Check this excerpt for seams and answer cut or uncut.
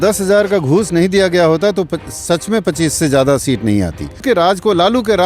cut